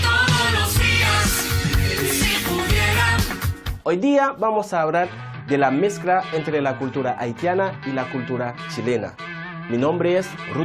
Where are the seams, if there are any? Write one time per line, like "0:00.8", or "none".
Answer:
0:02.5